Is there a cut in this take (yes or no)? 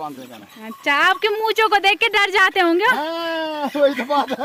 no